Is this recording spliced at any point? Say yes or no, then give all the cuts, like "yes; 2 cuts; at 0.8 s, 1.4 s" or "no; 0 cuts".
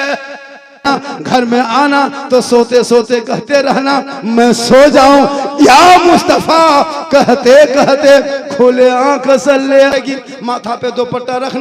yes; 2 cuts; at 1.1 s, 9.9 s